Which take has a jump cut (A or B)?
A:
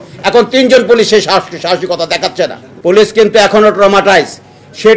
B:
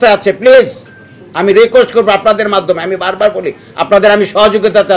A